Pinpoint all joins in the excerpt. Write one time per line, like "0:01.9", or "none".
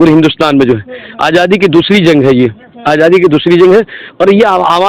none